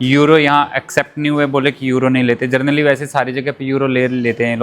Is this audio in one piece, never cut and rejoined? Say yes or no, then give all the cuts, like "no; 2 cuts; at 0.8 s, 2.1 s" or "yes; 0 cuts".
yes; 0 cuts